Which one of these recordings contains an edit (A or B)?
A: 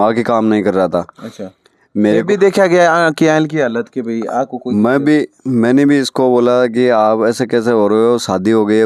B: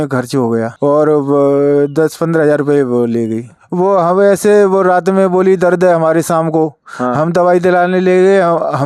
B